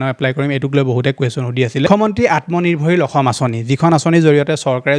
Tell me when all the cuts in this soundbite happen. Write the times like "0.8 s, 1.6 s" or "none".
1.9 s